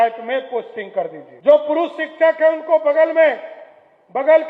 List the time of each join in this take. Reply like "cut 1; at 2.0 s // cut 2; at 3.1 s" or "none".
cut 1; at 1.3 s

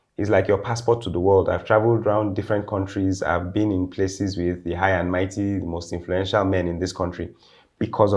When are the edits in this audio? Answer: none

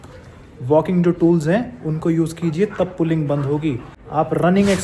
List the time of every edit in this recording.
cut 1; at 3.9 s

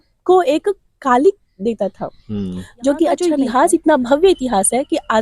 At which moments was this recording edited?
cut 1; at 3.2 s

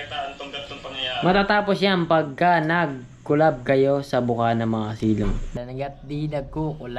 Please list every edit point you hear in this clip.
cut 1; at 5.5 s

